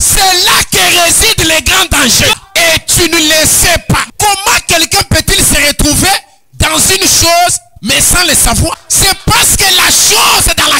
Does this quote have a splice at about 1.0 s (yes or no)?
no